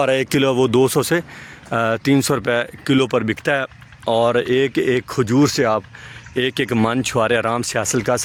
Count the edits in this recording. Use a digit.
0